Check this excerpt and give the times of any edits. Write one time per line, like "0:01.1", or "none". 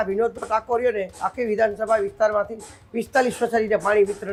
none